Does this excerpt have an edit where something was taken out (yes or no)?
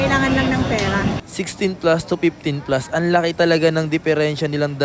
yes